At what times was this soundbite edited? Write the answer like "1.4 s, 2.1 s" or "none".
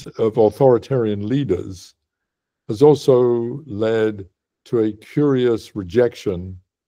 none